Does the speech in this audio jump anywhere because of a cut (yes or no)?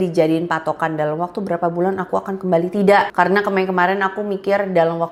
no